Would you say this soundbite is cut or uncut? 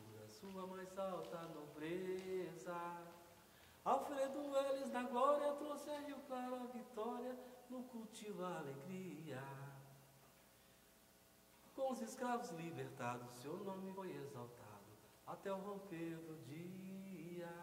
cut